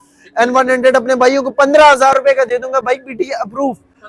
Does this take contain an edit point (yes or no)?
no